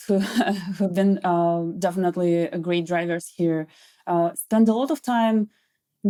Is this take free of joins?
yes; 0 cuts

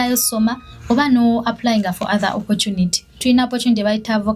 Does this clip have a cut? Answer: yes; 1 cut; at 3.1 s

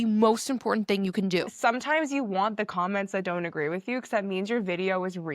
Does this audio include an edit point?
yes; 1 cut; at 1.5 s

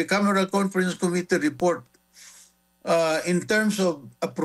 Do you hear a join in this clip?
no; 0 cuts

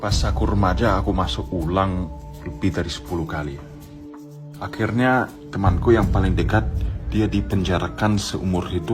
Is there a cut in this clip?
no; 0 cuts

